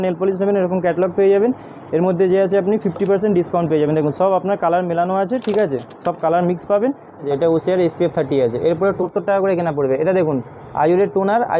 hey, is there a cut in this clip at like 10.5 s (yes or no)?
no